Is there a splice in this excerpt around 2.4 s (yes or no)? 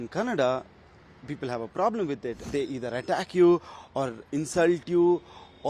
yes